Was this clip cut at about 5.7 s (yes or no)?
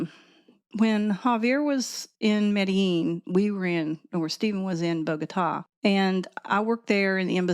yes